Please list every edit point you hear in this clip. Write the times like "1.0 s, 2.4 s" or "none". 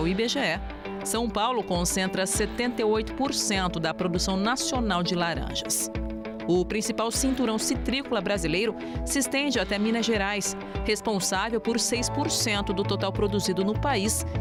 none